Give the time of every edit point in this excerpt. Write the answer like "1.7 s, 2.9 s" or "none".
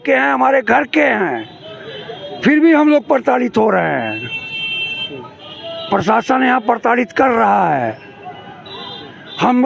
none